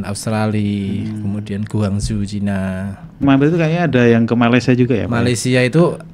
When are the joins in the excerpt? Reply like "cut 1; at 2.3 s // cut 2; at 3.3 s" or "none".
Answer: cut 1; at 3.2 s